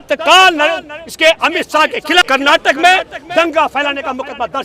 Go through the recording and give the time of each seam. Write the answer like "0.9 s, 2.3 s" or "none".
2.2 s